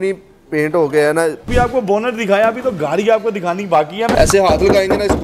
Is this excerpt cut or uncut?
cut